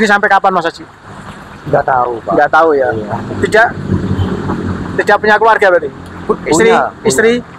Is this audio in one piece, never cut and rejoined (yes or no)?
yes